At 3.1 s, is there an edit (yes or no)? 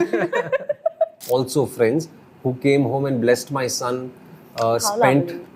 no